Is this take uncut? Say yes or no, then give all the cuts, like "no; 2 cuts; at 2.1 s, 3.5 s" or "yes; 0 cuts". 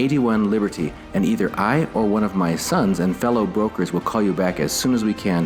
yes; 0 cuts